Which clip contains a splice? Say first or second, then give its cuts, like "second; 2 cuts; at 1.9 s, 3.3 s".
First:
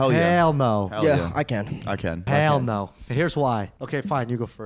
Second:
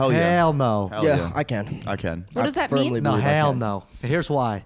first; 2 cuts; at 2.3 s, 3.8 s